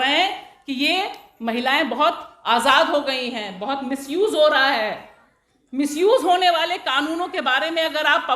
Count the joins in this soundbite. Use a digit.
0